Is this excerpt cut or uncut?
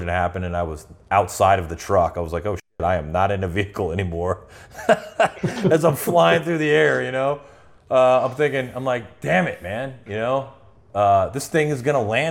uncut